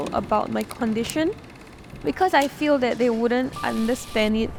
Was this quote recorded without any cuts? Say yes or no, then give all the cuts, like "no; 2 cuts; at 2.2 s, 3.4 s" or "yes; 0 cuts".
yes; 0 cuts